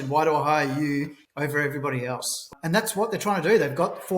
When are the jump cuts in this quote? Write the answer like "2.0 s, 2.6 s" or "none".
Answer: 1.2 s, 2.4 s